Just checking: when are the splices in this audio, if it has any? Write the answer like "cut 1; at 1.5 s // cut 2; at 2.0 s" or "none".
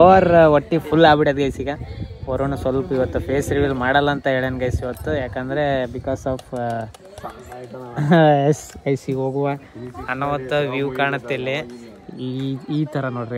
none